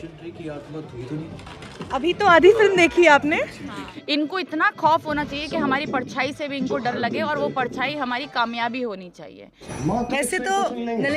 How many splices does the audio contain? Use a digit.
2